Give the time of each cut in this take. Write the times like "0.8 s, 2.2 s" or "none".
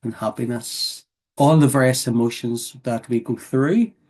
1.3 s